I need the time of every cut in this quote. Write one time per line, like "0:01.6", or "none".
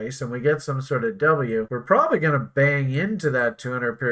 0:01.7

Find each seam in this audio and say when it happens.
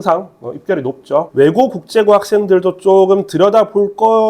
0:01.3

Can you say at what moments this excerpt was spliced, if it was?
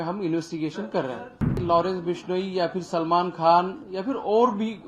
0:01.5

